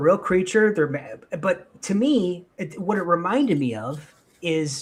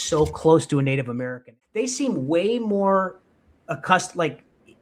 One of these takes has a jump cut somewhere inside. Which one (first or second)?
second